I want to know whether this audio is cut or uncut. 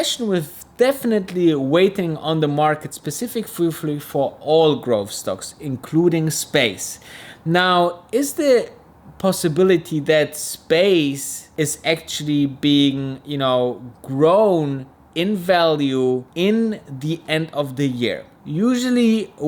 uncut